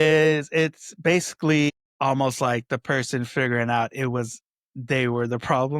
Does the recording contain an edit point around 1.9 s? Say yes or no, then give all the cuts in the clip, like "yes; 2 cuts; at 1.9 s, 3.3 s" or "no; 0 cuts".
yes; 1 cut; at 1.9 s